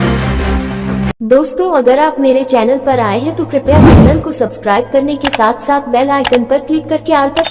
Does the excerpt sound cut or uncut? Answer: uncut